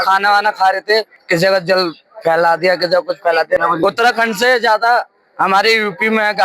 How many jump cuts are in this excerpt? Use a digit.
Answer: 2